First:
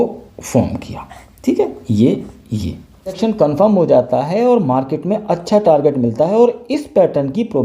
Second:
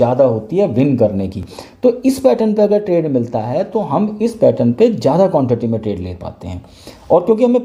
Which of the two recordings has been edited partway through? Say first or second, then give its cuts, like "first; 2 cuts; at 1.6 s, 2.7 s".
first; 1 cut; at 3.2 s